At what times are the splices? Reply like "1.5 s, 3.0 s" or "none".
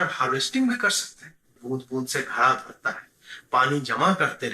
1.5 s